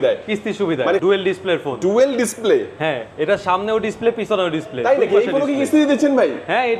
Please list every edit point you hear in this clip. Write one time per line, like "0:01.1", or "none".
0:01.0